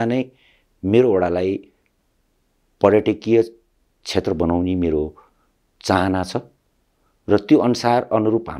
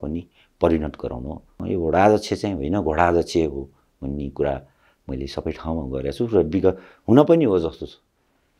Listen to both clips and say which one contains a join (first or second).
second